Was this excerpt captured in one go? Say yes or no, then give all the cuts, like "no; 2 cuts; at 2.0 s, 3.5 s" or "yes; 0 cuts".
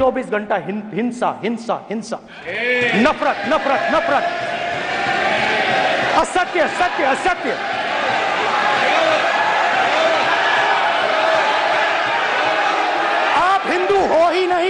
yes; 0 cuts